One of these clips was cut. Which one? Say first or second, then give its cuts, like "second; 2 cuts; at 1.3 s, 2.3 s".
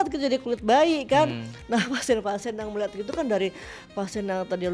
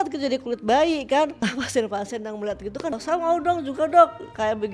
second; 2 cuts; at 1.4 s, 2.9 s